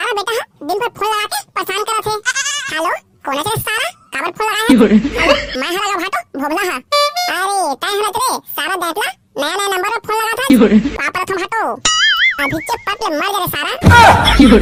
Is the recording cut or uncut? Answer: uncut